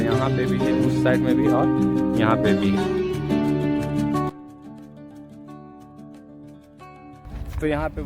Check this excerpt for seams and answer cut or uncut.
uncut